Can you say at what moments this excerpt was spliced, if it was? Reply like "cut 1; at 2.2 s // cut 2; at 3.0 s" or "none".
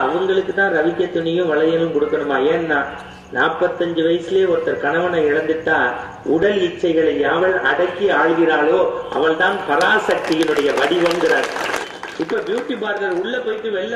cut 1; at 11.8 s